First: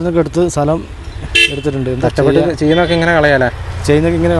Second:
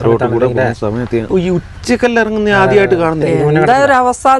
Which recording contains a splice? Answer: second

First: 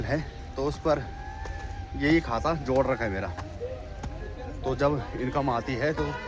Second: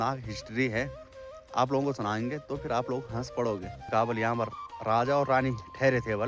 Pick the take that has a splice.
second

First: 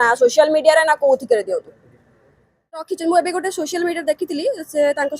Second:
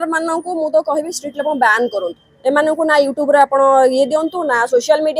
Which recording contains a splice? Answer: first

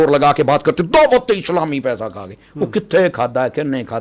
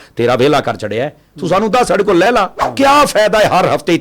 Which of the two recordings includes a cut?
second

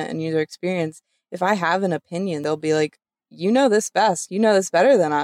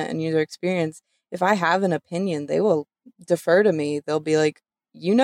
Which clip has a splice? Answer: first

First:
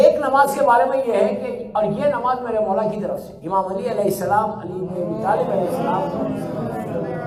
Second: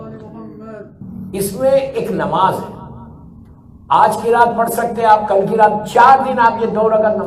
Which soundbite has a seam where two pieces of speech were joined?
second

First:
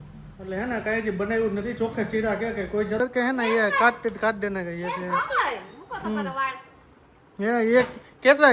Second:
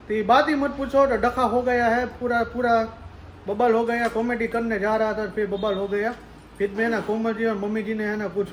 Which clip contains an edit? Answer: first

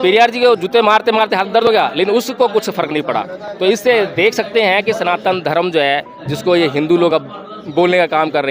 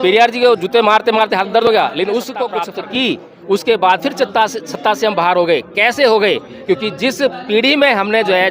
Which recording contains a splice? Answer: second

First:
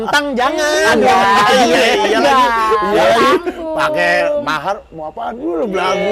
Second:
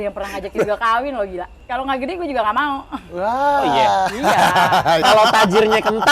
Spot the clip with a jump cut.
second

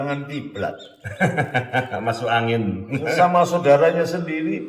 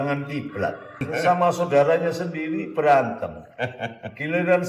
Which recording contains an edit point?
second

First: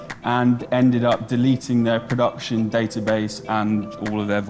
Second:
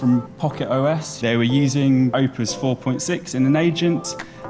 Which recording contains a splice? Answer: second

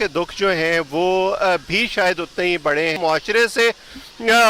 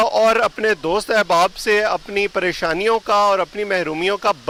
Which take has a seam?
first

